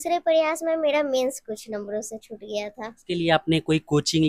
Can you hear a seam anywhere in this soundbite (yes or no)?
yes